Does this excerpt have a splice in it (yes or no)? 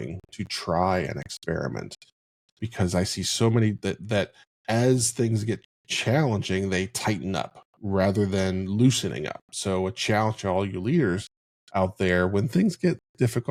no